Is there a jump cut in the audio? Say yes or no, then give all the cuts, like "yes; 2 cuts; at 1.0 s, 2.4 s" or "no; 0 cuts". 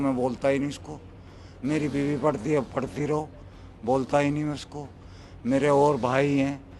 no; 0 cuts